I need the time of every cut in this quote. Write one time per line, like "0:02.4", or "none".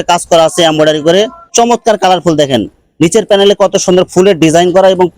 0:01.4